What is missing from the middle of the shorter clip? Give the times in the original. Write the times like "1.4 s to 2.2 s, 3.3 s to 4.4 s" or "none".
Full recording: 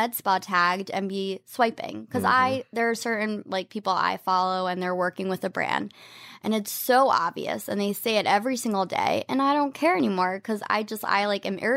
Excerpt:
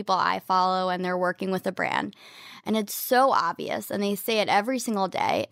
none